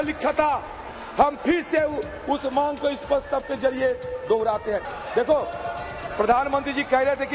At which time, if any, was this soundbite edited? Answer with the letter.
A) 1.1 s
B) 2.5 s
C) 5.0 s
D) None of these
C